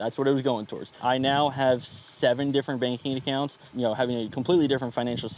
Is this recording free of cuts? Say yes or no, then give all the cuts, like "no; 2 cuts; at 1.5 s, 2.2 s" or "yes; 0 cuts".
no; 2 cuts; at 0.9 s, 3.6 s